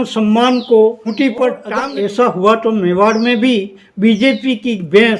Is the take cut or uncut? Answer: cut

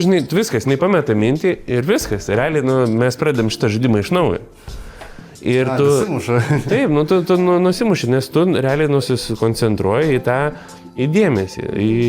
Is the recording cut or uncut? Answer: uncut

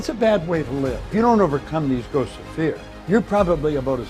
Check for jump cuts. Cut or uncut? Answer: cut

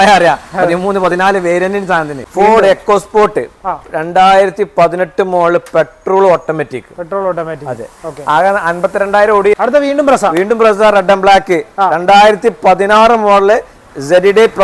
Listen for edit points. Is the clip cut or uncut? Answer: cut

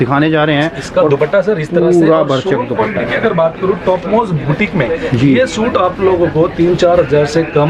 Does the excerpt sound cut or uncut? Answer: uncut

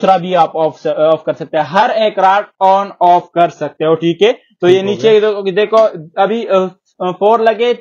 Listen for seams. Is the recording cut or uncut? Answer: uncut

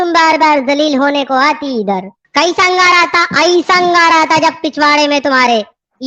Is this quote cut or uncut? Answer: cut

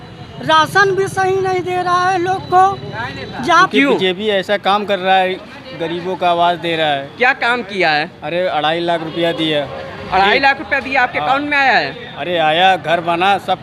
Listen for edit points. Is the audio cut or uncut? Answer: cut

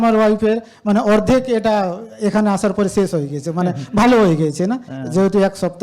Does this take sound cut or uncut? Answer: uncut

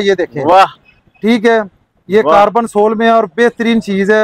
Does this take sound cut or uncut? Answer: uncut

